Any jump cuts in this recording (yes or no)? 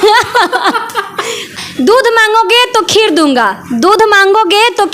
yes